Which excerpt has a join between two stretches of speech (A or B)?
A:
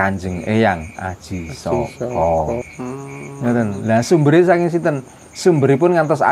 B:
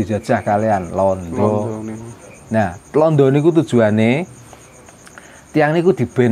A